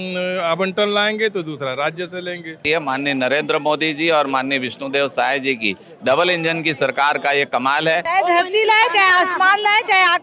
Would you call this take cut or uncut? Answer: cut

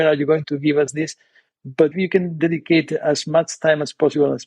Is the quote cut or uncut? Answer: cut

